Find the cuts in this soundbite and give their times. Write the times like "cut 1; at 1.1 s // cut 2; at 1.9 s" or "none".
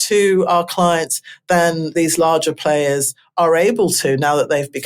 cut 1; at 1.9 s